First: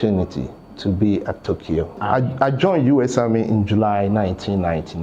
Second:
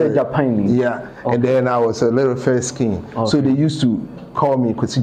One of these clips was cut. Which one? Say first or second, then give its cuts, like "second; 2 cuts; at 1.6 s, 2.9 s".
first; 1 cut; at 2.0 s